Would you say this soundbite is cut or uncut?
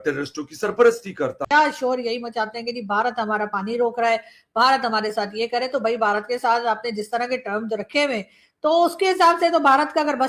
cut